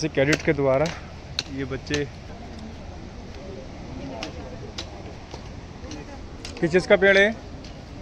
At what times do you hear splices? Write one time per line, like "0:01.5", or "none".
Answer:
none